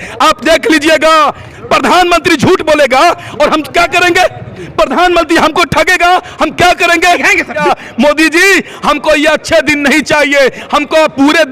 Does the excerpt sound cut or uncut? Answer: cut